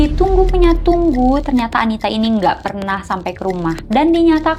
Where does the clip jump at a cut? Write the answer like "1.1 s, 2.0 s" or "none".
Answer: none